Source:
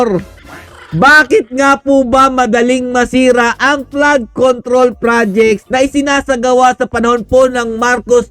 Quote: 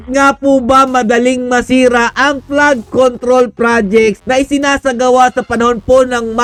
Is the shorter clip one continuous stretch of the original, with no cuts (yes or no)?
yes